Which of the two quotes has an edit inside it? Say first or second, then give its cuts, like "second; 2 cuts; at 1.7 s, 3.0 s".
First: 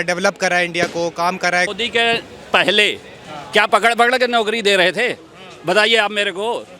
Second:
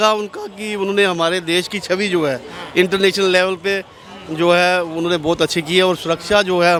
first; 1 cut; at 1.7 s